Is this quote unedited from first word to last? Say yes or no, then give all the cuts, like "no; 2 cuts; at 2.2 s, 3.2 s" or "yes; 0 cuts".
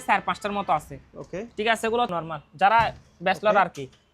no; 1 cut; at 2.1 s